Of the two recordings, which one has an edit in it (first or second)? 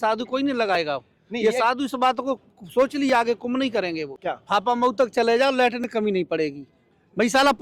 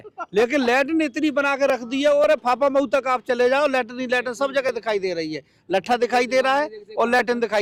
first